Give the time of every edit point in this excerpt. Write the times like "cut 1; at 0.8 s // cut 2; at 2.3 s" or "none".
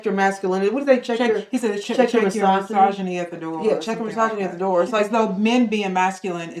cut 1; at 5.1 s